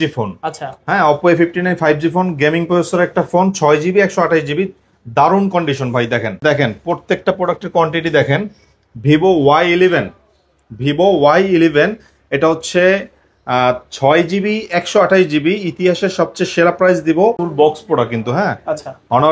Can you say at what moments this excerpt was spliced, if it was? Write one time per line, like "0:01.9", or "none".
0:06.4
0:17.4